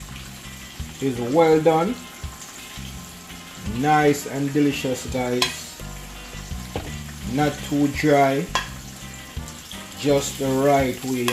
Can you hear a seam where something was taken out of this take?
no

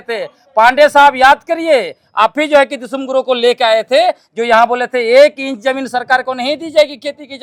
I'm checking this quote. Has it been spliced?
no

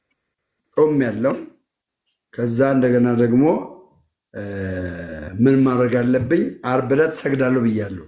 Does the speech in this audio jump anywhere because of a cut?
no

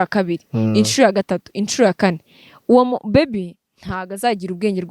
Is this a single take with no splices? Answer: yes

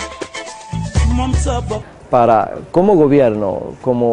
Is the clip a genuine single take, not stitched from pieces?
yes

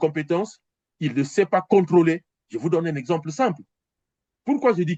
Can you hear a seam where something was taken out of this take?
no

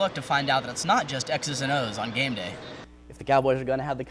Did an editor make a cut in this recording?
yes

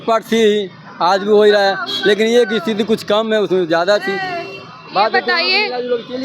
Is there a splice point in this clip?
no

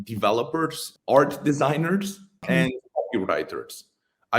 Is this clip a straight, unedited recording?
no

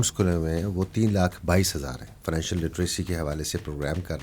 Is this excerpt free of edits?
no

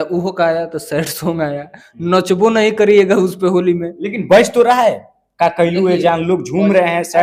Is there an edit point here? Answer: no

